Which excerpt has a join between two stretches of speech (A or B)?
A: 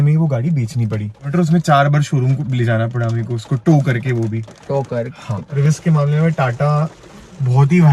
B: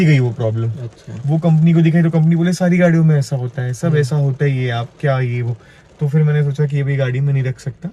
A